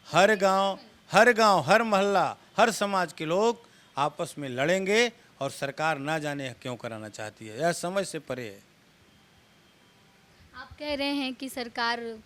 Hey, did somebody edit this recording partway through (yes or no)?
no